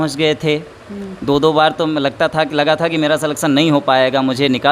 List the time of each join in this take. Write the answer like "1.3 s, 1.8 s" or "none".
none